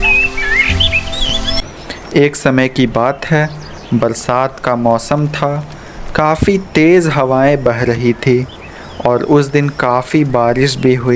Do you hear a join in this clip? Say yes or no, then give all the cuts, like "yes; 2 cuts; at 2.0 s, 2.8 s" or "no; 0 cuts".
yes; 1 cut; at 0.9 s